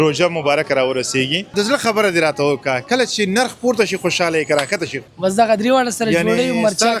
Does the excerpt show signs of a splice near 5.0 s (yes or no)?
yes